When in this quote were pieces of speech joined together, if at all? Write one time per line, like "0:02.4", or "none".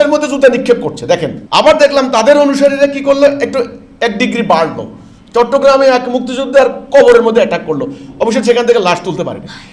0:01.4